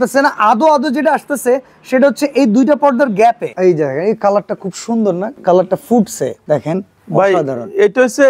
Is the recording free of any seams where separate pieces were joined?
no; 3 cuts; at 3.5 s, 5.3 s, 6.4 s

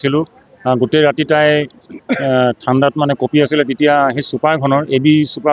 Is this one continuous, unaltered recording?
yes; 0 cuts

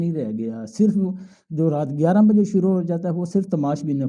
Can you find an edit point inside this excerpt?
no; 0 cuts

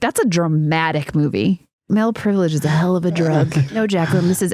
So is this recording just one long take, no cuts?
no; 2 cuts; at 1.9 s, 3.7 s

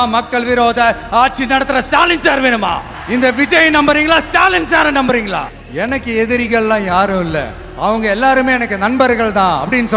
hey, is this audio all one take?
no; 2 cuts; at 2.9 s, 5.6 s

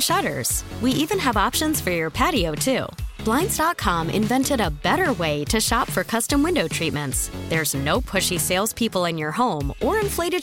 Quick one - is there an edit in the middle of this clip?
no; 0 cuts

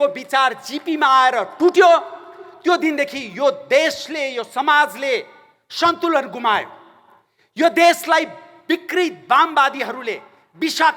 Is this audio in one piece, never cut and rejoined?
yes; 0 cuts

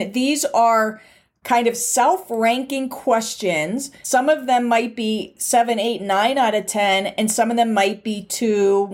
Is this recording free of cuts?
no; 1 cut; at 3.9 s

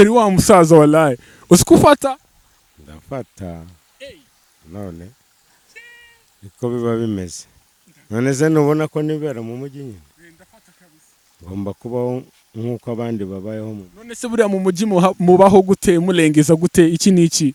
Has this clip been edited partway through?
no; 0 cuts

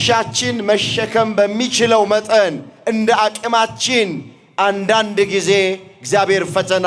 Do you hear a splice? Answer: no; 0 cuts

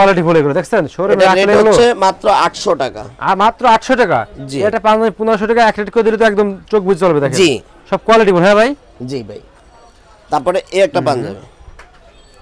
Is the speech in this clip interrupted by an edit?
no; 0 cuts

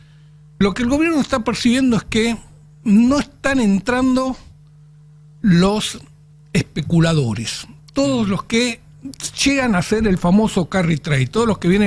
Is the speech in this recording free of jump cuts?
yes; 0 cuts

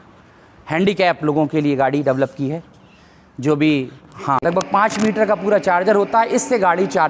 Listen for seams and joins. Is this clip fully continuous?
no; 1 cut; at 4.5 s

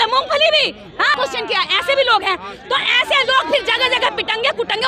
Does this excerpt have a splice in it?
yes; 1 cut; at 1.1 s

